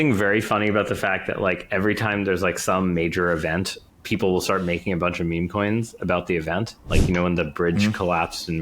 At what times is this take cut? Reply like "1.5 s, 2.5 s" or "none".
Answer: 3.8 s, 6.8 s